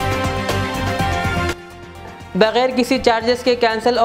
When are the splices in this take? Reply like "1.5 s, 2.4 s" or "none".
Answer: 1.7 s